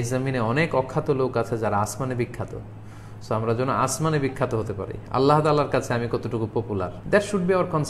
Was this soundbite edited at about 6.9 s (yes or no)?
yes